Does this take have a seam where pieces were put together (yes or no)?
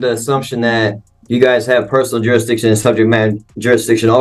no